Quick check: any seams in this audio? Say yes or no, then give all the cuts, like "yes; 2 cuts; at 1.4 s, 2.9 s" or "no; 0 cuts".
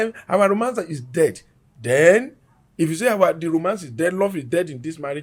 no; 0 cuts